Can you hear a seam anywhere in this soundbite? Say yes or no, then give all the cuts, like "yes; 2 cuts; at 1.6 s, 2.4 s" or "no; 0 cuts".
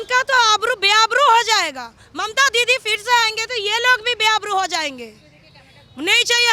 no; 0 cuts